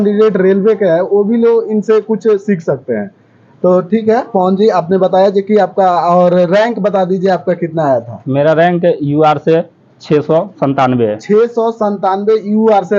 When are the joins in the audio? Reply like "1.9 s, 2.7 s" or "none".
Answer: none

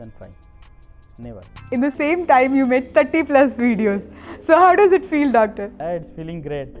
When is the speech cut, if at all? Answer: 1.7 s, 5.7 s

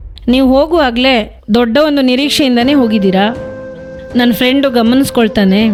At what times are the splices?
none

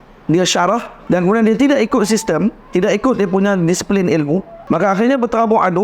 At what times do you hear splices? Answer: 0.9 s, 4.5 s

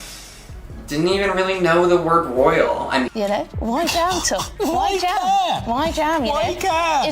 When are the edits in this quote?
3.1 s

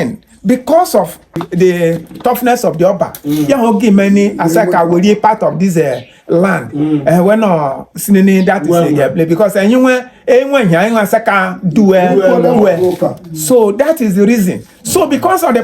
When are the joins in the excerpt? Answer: 1.4 s

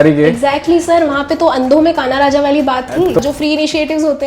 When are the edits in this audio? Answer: 3.2 s

